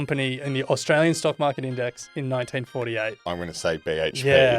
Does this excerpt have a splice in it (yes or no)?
yes